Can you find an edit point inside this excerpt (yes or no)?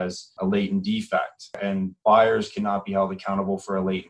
yes